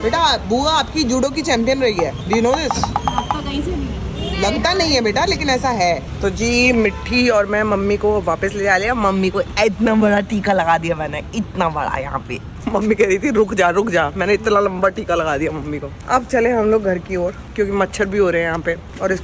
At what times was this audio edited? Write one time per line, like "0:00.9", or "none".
none